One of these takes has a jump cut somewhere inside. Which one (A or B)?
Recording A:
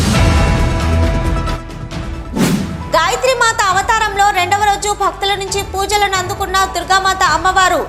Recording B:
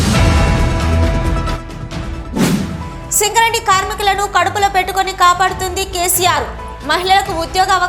A